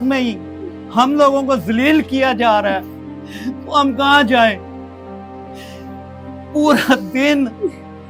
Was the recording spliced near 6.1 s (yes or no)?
no